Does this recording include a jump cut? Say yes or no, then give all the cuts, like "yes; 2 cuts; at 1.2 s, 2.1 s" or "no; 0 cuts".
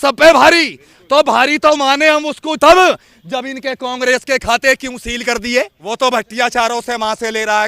yes; 1 cut; at 5.8 s